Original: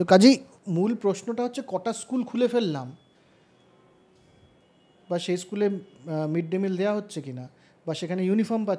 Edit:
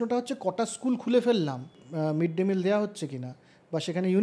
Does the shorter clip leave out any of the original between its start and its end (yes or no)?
yes